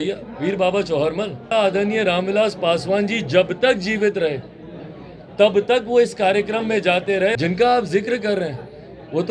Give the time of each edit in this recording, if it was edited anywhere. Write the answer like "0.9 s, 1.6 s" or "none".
1.5 s, 7.3 s